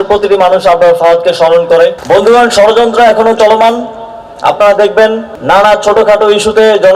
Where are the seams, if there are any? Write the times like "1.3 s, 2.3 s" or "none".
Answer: 1.9 s

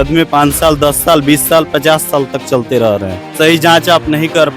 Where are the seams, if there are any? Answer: 3.2 s

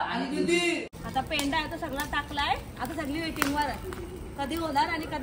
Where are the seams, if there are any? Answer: 0.9 s

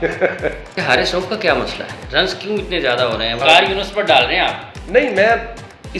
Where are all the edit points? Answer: 0.8 s, 3.4 s

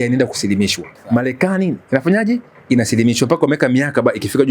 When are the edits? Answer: 0.9 s

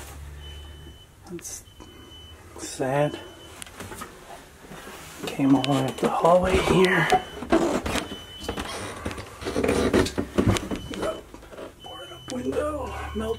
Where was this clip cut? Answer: none

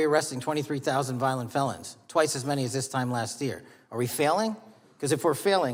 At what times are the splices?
none

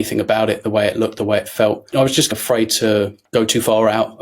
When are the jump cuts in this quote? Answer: 2.3 s, 3.2 s

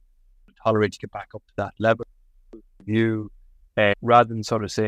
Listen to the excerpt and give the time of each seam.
4.0 s

